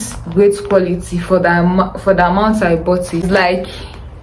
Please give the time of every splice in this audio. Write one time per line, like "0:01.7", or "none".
0:03.2